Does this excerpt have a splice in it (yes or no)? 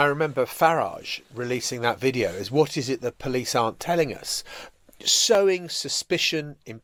no